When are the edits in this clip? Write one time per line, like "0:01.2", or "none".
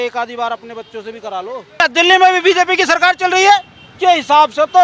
0:01.8
0:03.8